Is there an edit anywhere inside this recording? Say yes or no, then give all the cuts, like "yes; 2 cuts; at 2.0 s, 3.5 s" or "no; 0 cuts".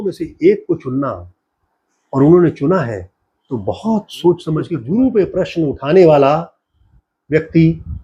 yes; 1 cut; at 4.8 s